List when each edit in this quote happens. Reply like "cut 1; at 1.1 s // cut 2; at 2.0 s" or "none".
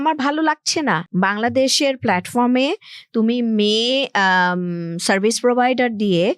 cut 1; at 1.1 s